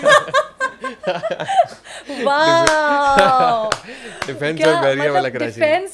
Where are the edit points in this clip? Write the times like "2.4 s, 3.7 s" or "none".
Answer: none